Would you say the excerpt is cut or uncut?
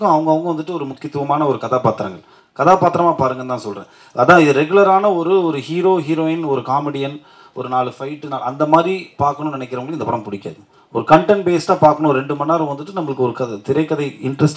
uncut